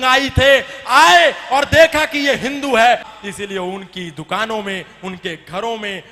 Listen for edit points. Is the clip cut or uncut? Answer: cut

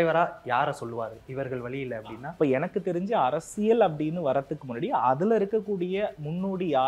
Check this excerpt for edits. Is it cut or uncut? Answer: uncut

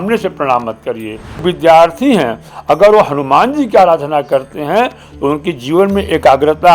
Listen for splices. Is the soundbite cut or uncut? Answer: cut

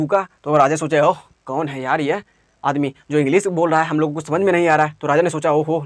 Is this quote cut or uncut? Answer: uncut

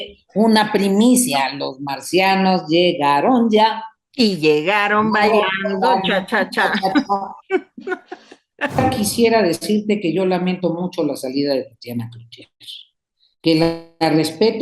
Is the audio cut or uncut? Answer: cut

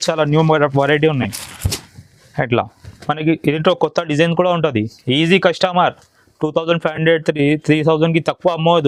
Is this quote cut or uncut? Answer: uncut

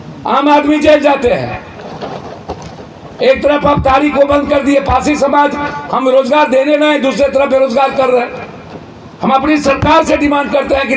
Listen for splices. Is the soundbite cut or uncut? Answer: uncut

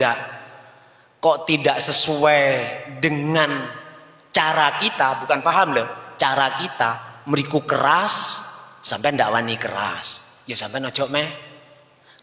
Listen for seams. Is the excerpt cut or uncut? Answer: uncut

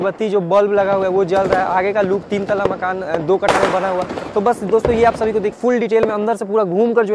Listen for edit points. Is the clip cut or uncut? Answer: cut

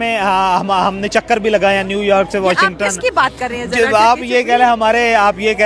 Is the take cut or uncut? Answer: uncut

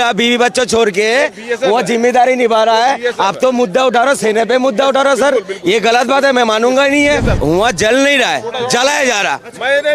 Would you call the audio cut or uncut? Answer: cut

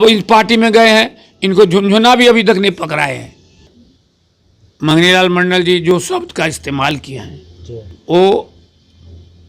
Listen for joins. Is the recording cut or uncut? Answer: cut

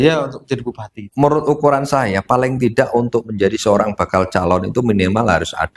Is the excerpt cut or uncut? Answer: cut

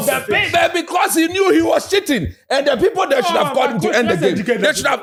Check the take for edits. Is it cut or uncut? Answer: uncut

